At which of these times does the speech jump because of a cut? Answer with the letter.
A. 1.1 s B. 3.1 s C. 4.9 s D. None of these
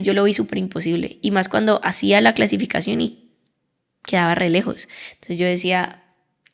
D